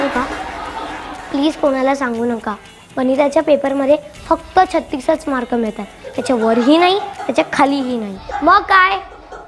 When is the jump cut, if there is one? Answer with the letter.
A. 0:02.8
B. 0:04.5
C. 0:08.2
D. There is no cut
C